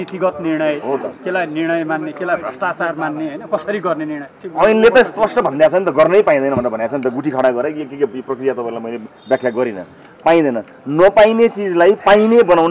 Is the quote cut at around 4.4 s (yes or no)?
yes